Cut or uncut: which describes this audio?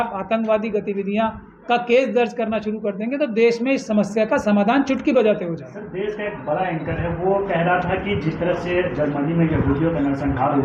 uncut